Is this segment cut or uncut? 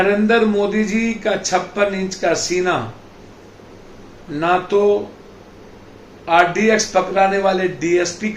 uncut